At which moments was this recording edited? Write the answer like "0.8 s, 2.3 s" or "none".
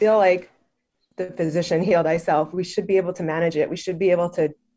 none

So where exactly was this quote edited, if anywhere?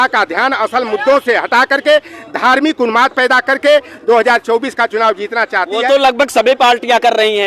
none

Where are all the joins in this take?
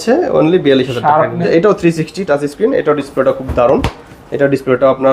1.4 s

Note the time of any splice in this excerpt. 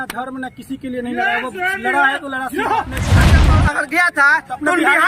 3.4 s

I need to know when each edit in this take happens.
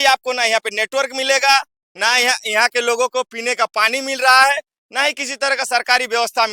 none

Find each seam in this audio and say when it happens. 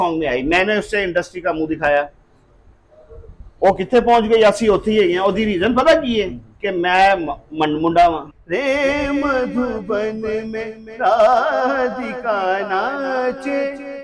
8.4 s

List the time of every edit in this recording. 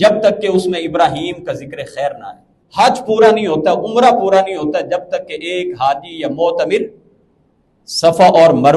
2.6 s

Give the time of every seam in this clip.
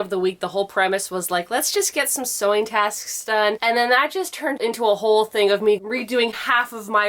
3.6 s, 5.8 s

